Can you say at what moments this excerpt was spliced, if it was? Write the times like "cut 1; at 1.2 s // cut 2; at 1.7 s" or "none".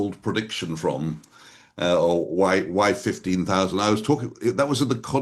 none